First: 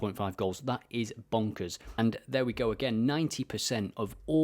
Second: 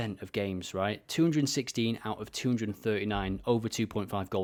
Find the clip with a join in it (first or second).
first